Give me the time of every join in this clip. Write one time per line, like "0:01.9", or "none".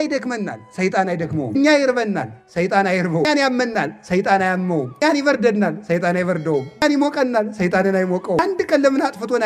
0:01.5
0:03.3
0:05.0
0:06.8
0:08.4